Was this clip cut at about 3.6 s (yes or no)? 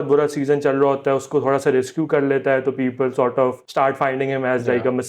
yes